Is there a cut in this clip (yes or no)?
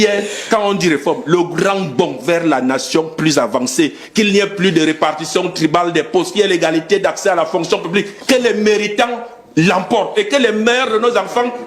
no